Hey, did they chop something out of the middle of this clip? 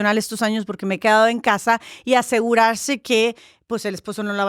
no; 0 cuts

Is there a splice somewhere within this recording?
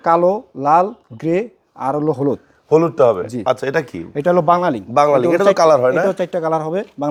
no; 0 cuts

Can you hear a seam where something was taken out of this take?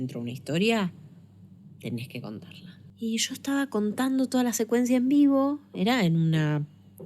yes; 1 cut; at 2.8 s

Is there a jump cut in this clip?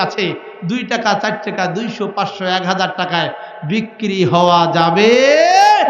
no; 0 cuts

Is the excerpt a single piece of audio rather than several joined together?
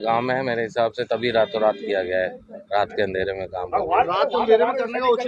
yes; 0 cuts

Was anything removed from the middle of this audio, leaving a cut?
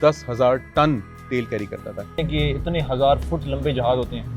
yes; 1 cut; at 2.2 s

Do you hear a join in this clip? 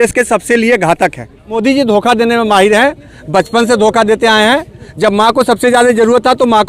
yes; 1 cut; at 1.5 s

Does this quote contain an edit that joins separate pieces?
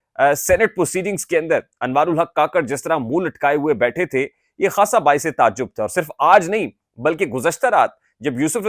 no; 0 cuts

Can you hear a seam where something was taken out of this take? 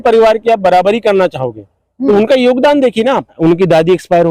yes; 1 cut; at 3.4 s

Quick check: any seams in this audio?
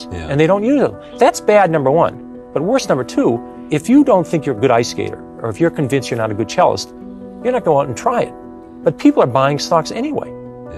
yes; 2 cuts; at 1.0 s, 3.5 s

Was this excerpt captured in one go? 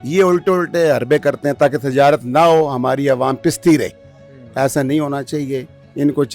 yes; 0 cuts

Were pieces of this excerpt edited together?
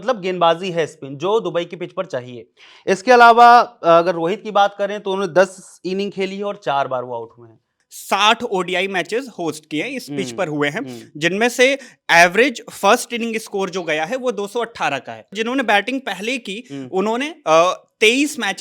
yes; 2 cuts; at 7.8 s, 15.3 s

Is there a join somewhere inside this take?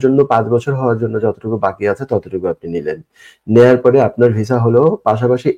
no; 0 cuts

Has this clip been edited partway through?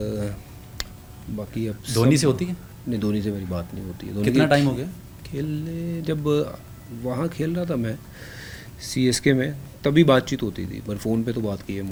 no; 0 cuts

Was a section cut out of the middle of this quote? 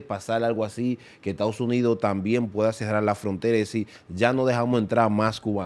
no; 0 cuts

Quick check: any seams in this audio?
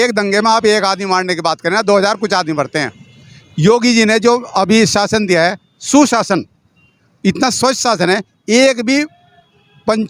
no; 0 cuts

